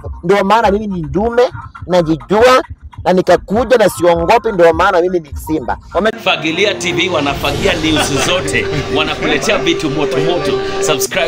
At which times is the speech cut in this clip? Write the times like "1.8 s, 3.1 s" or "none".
6.1 s